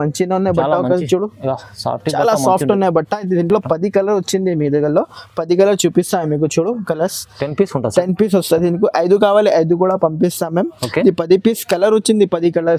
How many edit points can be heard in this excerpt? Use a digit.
0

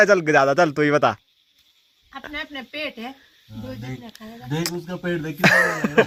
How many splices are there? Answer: 0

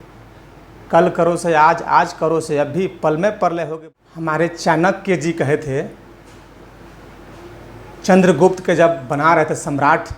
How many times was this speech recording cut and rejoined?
1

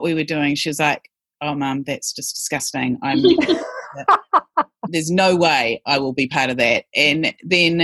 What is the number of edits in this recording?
1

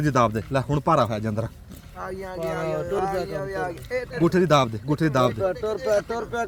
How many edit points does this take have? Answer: 0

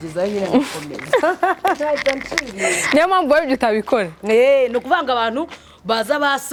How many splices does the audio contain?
0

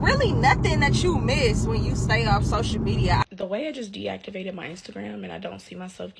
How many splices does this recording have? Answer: 1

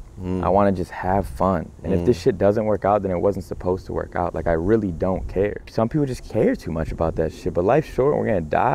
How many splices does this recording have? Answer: 1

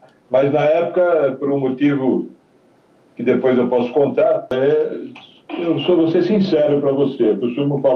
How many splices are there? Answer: 1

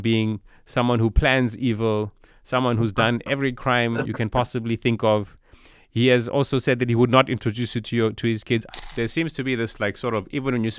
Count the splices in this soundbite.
1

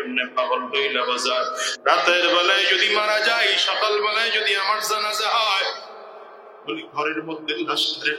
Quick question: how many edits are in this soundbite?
1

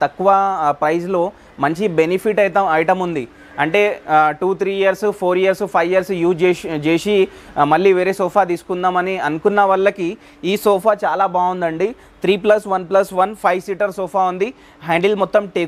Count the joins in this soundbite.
0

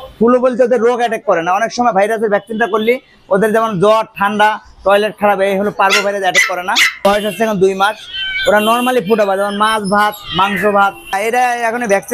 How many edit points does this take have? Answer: 2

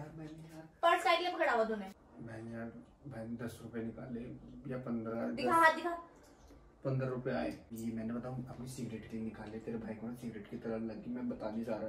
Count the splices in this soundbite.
2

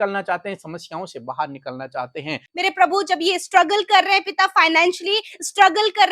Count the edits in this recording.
1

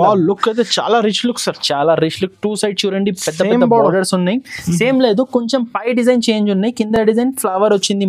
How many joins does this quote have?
0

